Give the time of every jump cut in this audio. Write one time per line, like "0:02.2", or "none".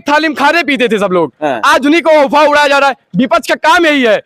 none